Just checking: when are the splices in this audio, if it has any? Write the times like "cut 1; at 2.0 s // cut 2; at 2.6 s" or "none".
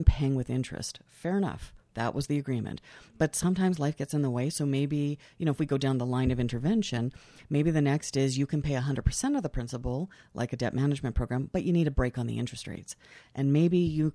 none